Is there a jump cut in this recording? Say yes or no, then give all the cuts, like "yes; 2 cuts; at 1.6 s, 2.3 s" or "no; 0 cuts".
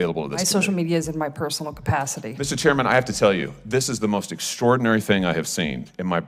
no; 0 cuts